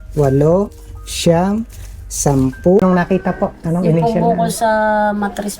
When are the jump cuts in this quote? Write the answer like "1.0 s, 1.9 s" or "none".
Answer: 2.8 s